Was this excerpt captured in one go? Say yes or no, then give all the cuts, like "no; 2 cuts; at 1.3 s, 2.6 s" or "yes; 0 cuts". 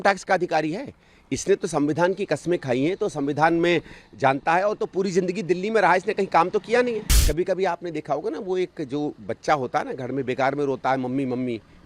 no; 1 cut; at 7.1 s